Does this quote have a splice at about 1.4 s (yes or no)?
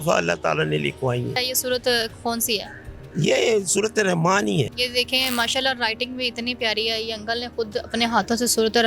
yes